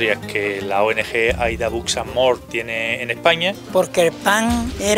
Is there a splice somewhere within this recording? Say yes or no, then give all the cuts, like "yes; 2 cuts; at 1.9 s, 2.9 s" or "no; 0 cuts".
yes; 1 cut; at 3.6 s